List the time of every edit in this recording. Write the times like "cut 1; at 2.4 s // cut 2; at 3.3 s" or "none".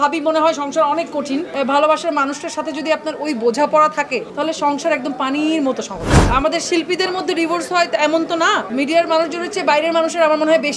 cut 1; at 1.5 s // cut 2; at 4.3 s // cut 3; at 6.2 s // cut 4; at 8.7 s